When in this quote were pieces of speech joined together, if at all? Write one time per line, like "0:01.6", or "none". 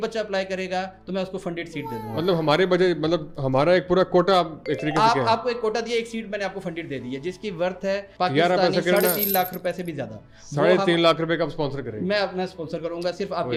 none